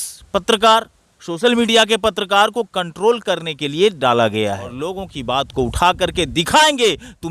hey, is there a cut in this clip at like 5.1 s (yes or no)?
yes